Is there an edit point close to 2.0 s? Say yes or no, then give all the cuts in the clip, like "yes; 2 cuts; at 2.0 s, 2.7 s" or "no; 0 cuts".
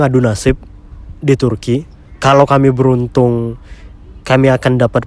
yes; 1 cut; at 2.0 s